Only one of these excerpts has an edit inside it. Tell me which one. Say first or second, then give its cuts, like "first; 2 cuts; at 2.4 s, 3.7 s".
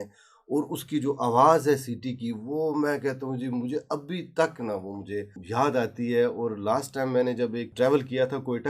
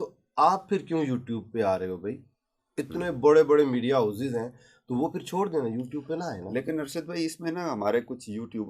first; 2 cuts; at 5.4 s, 7.7 s